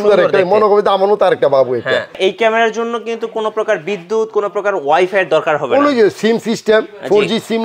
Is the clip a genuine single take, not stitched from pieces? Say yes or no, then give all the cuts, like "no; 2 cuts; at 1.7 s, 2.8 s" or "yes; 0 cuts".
no; 1 cut; at 2.1 s